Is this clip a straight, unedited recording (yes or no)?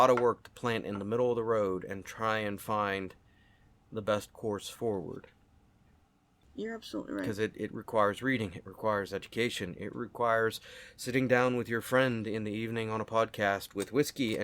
no